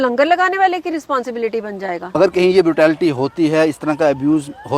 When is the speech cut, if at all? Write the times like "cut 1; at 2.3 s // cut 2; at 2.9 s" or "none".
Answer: cut 1; at 2.2 s